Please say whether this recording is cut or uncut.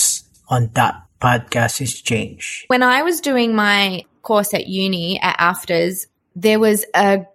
cut